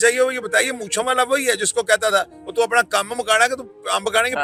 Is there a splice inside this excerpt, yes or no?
no